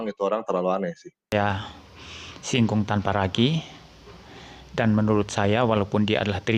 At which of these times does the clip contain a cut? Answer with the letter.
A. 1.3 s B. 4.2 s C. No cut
A